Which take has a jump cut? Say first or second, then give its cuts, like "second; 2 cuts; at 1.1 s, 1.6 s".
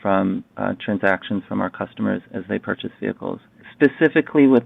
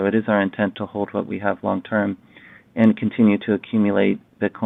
first; 1 cut; at 3.6 s